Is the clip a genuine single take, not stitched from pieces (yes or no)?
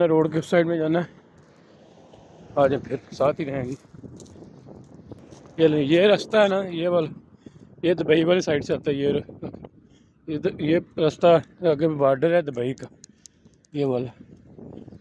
yes